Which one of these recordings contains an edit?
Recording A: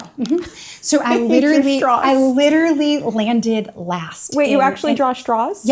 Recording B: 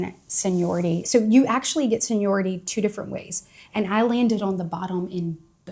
B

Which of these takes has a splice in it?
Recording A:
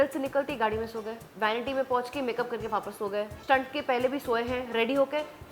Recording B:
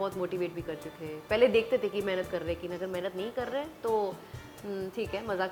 A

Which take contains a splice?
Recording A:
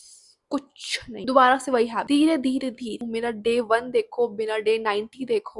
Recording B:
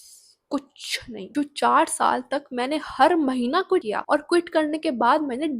B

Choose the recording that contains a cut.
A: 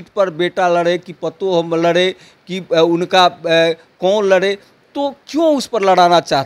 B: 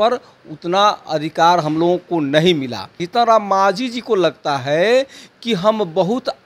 B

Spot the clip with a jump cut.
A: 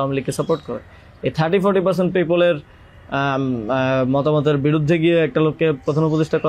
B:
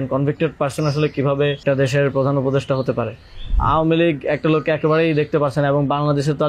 B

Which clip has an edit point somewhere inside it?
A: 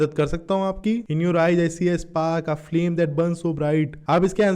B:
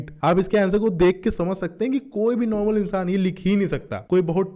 A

